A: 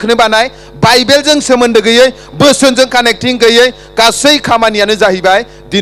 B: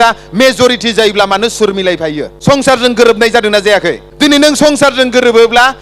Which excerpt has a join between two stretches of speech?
B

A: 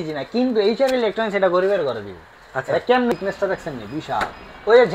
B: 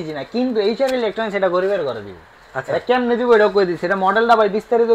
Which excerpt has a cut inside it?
A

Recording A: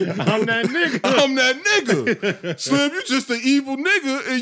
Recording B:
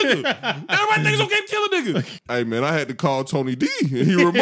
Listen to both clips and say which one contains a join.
B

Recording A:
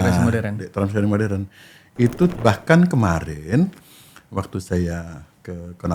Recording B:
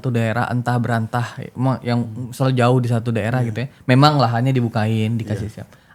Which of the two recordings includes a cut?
A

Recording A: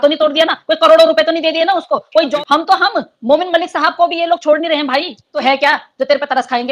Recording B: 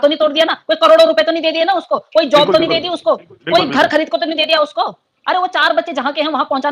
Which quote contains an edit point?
A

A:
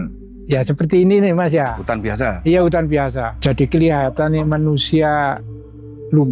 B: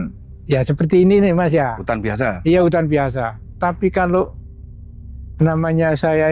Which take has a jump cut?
A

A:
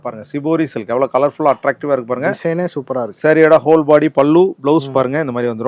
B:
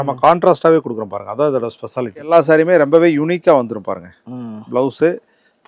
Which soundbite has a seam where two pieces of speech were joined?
B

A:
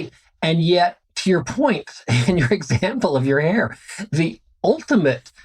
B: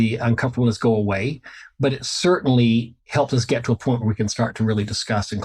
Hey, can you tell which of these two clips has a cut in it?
A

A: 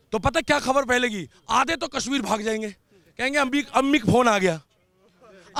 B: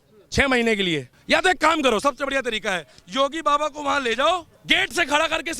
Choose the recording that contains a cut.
B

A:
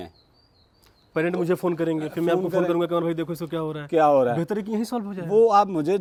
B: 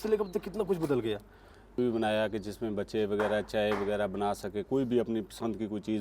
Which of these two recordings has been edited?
B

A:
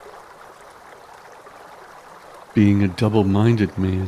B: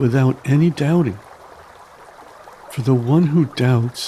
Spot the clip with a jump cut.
A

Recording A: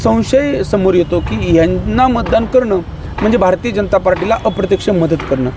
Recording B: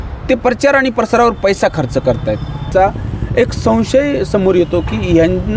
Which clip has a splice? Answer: B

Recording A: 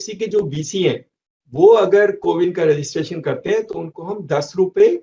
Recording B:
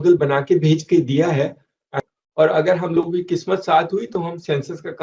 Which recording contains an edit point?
B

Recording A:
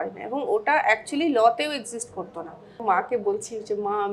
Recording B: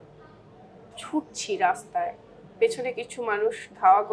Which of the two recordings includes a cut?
A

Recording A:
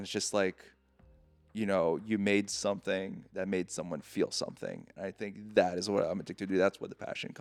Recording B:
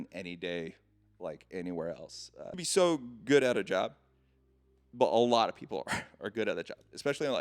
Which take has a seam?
B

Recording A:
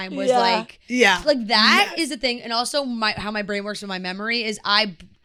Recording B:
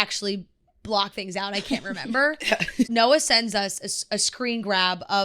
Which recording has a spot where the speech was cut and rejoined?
B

